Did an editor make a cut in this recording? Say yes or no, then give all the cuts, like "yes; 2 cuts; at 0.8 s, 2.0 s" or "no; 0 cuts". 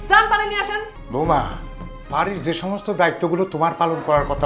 yes; 1 cut; at 0.9 s